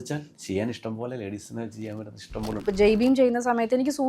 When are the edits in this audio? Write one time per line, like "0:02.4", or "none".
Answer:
0:02.6